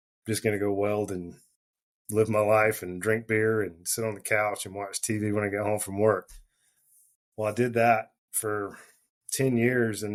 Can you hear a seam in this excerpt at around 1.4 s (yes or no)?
no